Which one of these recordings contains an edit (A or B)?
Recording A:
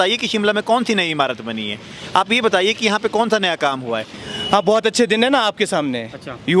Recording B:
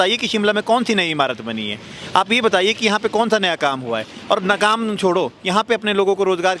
A